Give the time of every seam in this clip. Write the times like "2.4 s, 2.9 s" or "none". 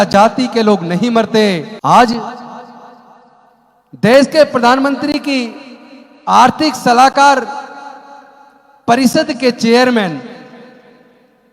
1.7 s